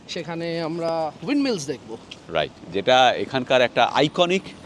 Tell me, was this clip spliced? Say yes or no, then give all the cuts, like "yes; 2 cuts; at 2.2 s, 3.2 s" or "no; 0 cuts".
no; 0 cuts